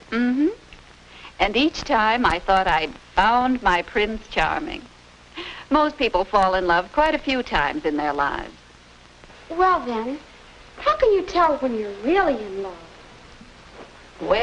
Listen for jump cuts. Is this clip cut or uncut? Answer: uncut